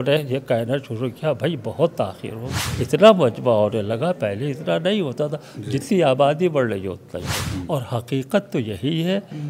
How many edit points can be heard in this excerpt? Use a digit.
2